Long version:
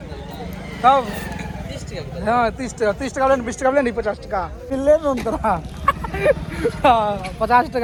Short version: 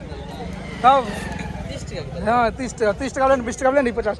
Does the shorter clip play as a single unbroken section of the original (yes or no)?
yes